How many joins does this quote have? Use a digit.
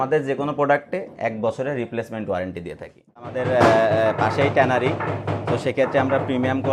1